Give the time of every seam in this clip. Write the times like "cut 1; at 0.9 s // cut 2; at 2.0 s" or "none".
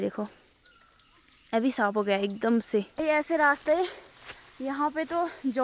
cut 1; at 2.9 s